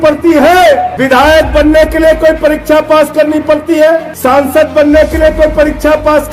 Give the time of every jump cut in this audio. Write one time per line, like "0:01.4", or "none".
0:00.9
0:04.1